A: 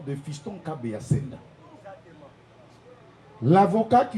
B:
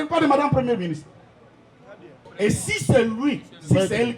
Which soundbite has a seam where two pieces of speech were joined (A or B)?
B